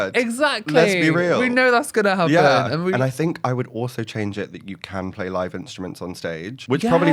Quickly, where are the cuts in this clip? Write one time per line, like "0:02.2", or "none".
0:02.9